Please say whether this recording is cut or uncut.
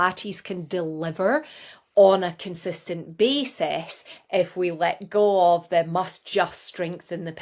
uncut